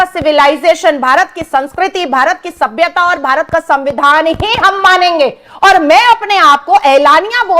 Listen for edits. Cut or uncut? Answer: uncut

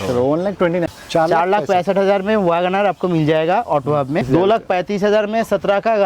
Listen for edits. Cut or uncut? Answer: cut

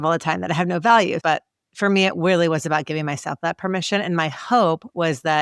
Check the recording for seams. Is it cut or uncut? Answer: cut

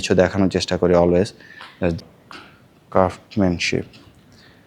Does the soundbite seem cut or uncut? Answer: cut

